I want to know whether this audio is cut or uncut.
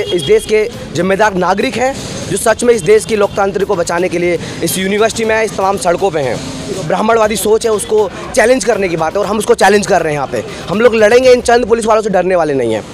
cut